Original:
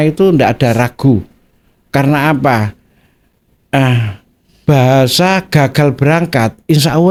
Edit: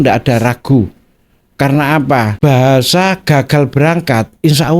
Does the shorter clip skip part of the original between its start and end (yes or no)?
yes